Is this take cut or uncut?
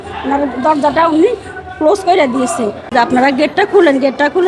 cut